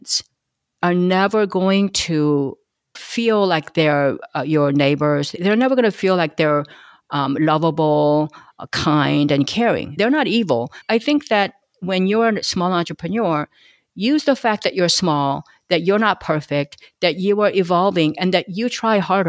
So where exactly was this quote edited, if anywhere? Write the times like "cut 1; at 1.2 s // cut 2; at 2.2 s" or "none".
cut 1; at 10.8 s